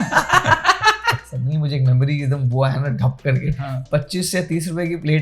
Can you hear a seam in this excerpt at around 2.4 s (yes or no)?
no